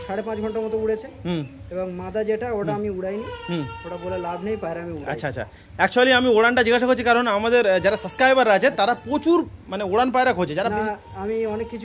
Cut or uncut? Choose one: uncut